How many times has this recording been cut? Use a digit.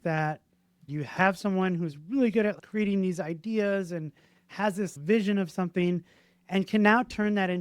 3